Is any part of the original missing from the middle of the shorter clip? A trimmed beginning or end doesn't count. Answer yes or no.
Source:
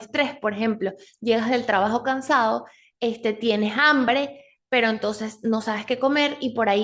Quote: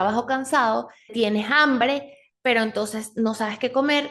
yes